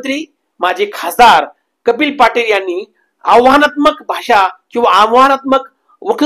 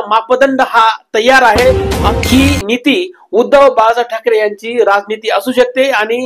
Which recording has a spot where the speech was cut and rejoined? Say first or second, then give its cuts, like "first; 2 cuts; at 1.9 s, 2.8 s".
second; 1 cut; at 2.1 s